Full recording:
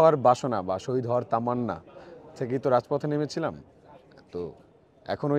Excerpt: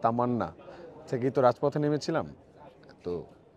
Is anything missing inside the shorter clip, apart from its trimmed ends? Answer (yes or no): no